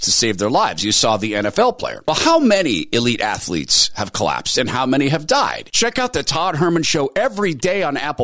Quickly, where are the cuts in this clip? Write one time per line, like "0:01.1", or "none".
0:05.7

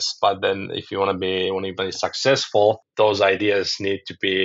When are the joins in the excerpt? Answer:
none

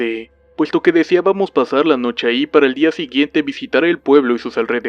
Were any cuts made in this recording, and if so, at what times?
0:01.6

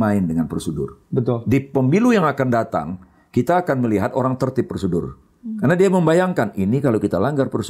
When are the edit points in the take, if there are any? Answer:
none

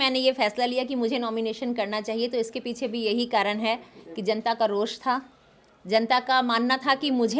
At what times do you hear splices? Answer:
none

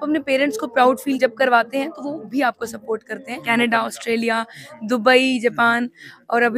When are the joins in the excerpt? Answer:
0:01.2
0:03.4

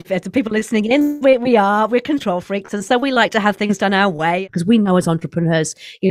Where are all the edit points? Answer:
0:04.4

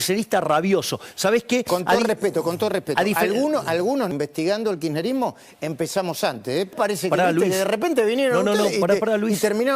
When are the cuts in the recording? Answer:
0:04.1
0:06.7

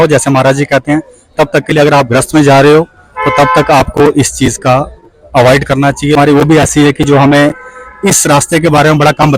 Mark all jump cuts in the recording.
0:06.2

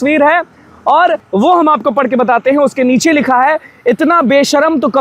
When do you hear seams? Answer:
0:01.2

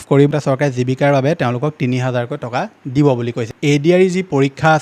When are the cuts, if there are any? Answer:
0:03.4

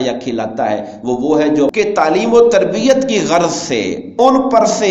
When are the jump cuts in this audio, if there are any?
0:01.7

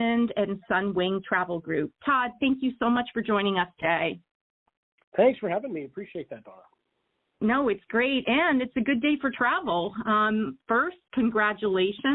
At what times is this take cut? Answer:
none

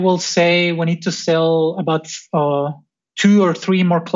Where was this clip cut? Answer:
none

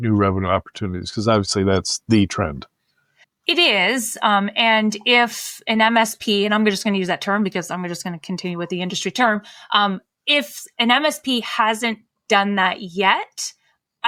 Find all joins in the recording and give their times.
none

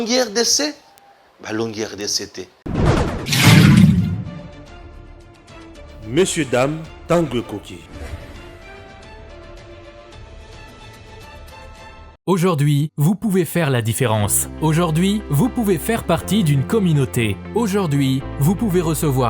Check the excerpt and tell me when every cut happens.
0:02.5

